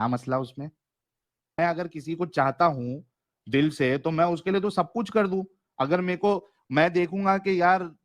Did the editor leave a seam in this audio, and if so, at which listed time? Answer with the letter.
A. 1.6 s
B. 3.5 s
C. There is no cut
A